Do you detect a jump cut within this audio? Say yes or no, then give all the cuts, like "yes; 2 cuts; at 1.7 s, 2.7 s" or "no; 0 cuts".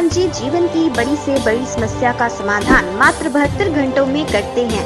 no; 0 cuts